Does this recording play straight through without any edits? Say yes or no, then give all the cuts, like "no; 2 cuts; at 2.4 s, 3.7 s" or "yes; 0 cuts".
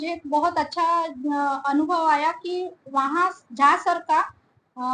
yes; 0 cuts